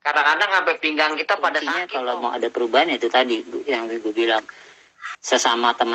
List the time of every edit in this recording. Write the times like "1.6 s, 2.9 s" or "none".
1.9 s